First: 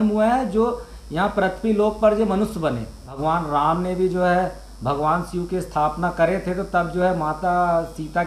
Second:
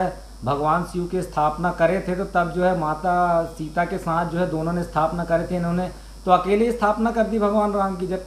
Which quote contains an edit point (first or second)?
first